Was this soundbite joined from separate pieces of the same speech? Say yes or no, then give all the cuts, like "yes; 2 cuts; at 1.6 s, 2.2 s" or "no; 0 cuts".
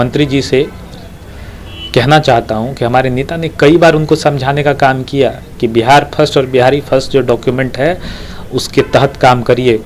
no; 0 cuts